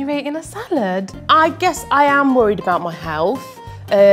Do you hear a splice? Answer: yes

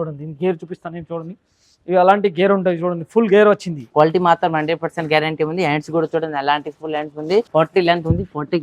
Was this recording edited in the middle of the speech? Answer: yes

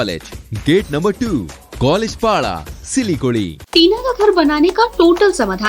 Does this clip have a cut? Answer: yes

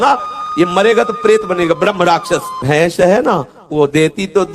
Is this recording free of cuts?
no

